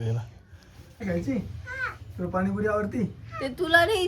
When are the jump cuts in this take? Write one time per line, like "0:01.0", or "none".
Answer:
0:01.0